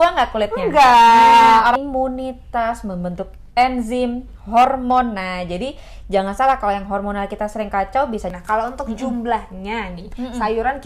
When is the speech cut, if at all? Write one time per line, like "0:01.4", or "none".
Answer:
0:01.8
0:08.3